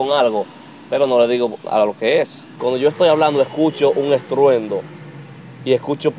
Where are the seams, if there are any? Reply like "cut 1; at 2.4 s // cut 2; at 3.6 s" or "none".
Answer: cut 1; at 2.4 s